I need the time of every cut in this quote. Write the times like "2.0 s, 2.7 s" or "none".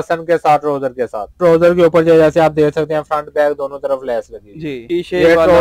1.2 s, 4.8 s